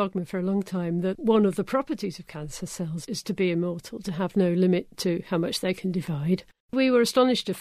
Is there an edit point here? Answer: yes; 3 cuts; at 1.2 s, 3.0 s, 6.6 s

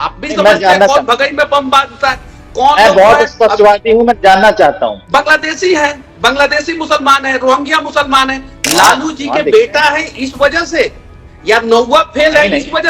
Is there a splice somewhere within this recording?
yes; 2 cuts; at 5.0 s, 8.5 s

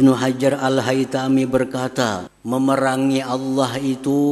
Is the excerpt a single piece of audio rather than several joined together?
no; 1 cut; at 2.3 s

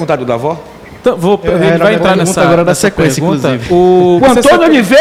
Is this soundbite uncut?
yes; 0 cuts

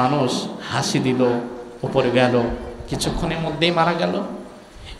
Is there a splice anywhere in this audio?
no; 0 cuts

